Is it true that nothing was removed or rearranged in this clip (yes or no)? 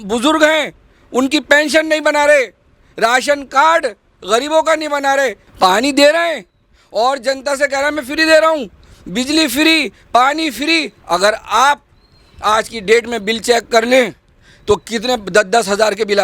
no